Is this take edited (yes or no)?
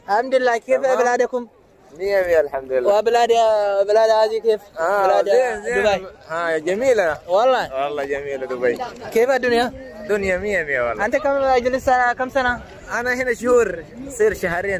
no